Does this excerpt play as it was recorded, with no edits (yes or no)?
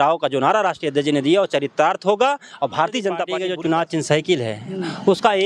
no